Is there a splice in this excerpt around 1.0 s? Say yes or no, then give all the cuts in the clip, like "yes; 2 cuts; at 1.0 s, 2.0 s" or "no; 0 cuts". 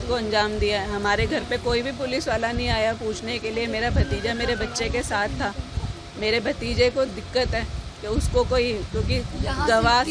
no; 0 cuts